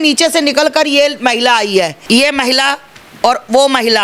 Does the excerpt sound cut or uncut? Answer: cut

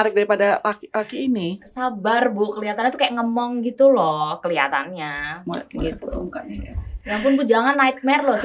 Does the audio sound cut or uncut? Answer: uncut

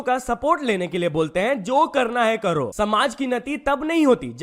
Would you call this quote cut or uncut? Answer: cut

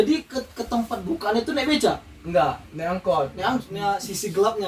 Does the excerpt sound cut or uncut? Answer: cut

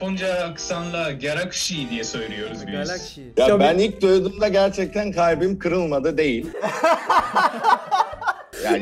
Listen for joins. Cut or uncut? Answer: cut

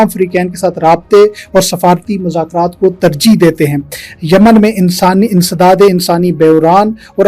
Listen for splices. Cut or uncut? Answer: uncut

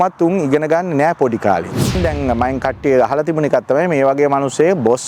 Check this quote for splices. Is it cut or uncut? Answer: cut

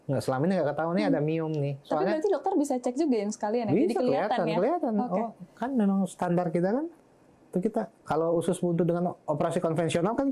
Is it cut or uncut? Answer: uncut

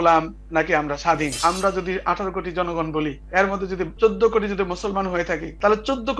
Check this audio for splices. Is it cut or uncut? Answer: cut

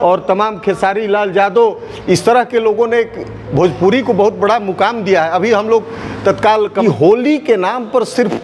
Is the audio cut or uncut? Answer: cut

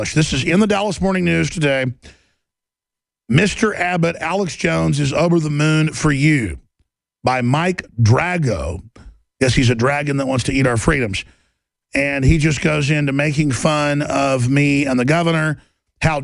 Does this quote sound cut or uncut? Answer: cut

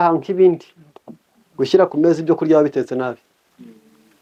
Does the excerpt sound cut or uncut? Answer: uncut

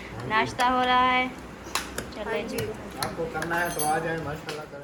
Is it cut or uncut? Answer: uncut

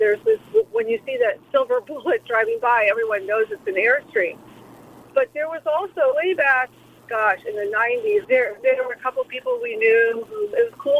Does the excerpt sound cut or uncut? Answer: cut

